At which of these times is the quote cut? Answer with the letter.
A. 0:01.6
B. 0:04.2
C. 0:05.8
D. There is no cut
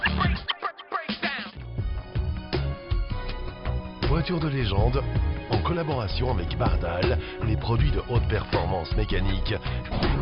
A